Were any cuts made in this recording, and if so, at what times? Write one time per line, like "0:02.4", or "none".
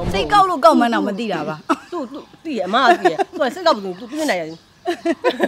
none